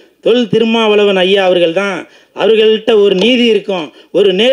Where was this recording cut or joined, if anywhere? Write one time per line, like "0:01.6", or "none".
none